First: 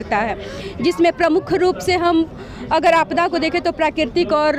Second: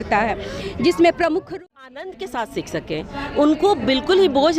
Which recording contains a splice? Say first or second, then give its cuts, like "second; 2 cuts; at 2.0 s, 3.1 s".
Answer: second; 1 cut; at 1.5 s